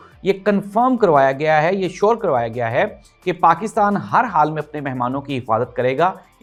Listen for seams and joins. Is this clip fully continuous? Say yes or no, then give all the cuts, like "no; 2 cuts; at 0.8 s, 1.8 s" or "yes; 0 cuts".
yes; 0 cuts